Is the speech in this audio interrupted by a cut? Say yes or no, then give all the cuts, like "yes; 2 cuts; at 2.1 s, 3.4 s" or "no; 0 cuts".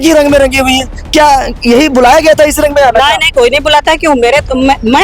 no; 0 cuts